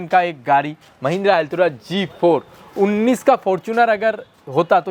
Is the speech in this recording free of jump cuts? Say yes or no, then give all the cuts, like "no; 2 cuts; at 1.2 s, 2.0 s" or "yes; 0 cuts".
yes; 0 cuts